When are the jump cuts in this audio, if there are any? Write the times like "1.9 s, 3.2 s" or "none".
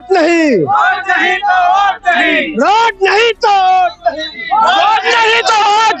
none